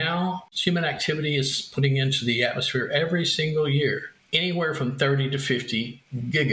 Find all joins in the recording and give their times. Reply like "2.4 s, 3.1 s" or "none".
none